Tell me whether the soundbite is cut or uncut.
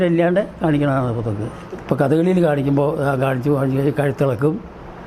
cut